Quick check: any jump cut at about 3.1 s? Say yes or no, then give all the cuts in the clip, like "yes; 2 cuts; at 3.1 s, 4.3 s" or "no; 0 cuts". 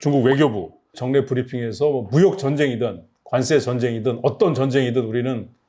no; 1 cut; at 1.0 s